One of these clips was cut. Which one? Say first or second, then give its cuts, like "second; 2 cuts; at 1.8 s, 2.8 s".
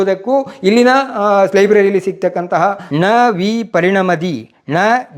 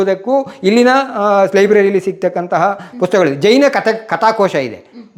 first; 1 cut; at 2.8 s